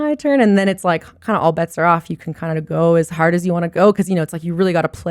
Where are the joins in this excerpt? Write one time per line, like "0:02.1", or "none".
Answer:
none